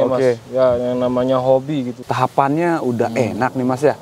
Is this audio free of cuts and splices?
no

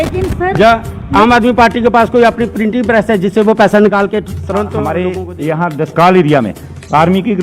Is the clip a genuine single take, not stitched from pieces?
no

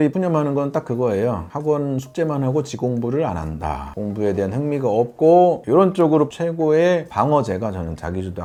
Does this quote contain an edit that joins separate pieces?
no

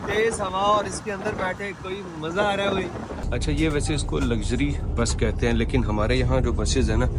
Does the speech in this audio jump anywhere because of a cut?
yes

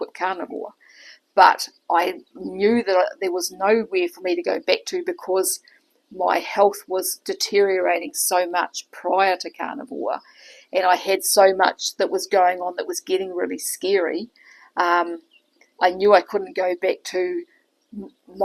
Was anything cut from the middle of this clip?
no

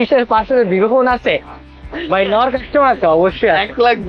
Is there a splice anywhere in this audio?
no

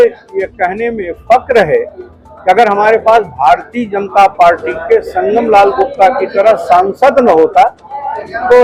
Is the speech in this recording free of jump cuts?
yes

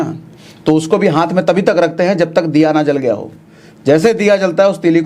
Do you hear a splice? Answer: no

